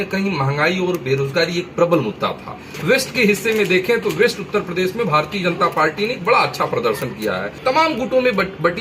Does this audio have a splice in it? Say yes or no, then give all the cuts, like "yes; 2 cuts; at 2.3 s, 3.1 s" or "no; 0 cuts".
yes; 2 cuts; at 2.7 s, 7.5 s